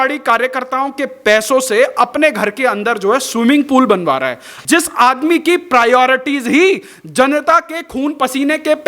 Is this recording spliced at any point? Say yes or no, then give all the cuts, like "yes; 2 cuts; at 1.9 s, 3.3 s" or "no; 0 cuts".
yes; 1 cut; at 4.5 s